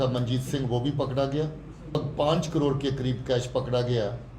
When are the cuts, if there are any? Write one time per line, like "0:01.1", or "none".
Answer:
0:02.0